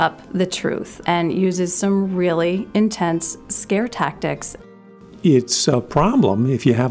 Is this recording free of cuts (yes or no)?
no